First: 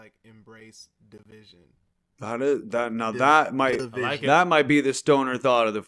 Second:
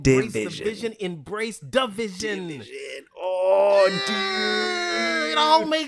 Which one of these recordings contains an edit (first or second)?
first